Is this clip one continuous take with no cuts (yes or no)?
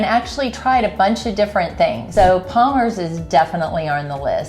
no